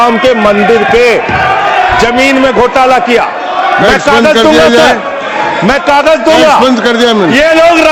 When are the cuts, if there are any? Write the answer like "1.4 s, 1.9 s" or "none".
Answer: none